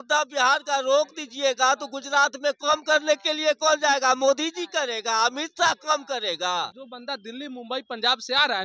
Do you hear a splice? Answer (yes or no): yes